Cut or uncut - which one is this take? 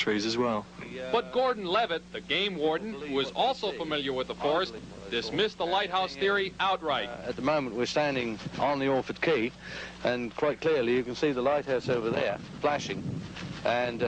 uncut